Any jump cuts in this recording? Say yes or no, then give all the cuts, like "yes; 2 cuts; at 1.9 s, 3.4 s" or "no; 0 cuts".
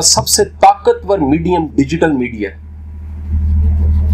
no; 0 cuts